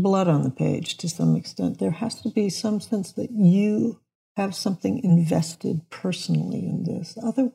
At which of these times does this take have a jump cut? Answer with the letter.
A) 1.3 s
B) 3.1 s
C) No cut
C